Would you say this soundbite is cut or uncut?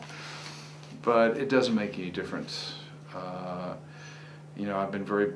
uncut